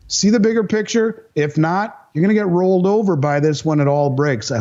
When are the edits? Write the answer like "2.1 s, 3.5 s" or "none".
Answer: none